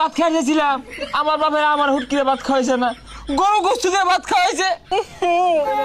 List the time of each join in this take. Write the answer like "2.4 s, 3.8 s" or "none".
4.9 s